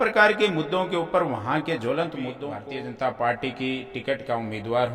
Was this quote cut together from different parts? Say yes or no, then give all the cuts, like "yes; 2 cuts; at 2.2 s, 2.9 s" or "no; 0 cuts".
yes; 1 cut; at 2.5 s